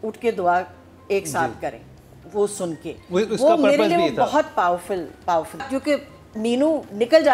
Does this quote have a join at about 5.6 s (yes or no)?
yes